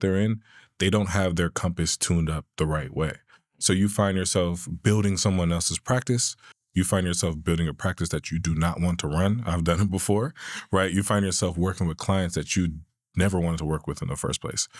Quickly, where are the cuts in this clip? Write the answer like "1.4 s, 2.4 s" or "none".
none